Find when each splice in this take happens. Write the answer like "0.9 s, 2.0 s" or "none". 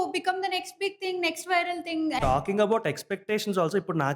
2.2 s